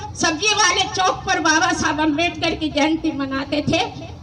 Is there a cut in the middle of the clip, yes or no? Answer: no